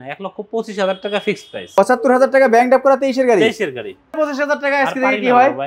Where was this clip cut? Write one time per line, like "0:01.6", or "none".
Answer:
0:01.9
0:04.2